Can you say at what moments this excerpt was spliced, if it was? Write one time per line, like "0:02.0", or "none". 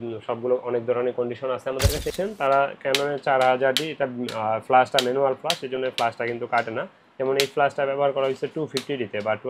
0:02.1